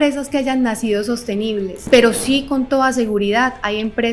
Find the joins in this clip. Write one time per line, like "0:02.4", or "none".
0:01.8